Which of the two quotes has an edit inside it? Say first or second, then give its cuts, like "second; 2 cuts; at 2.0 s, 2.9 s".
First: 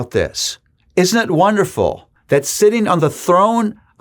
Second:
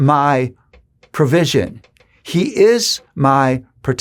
first; 1 cut; at 2.1 s